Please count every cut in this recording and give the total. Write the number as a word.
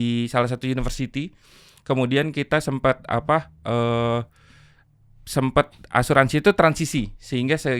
zero